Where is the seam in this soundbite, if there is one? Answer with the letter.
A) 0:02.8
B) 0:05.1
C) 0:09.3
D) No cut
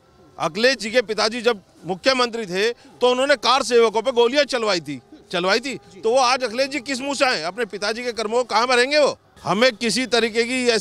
C